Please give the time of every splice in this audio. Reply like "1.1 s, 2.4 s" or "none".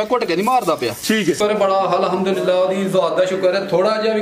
1.4 s